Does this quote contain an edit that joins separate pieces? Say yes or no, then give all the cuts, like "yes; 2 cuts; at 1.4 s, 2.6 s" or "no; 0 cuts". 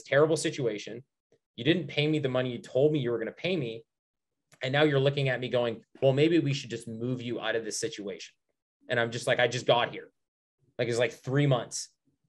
no; 0 cuts